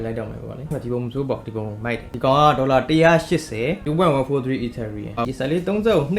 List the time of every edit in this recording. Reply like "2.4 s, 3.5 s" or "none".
5.2 s